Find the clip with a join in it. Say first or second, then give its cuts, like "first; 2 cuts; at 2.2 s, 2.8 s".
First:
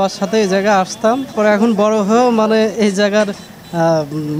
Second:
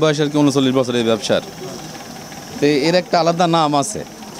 first; 1 cut; at 1.3 s